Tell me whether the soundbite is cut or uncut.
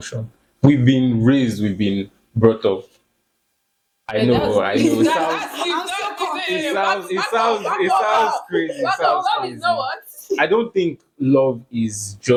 uncut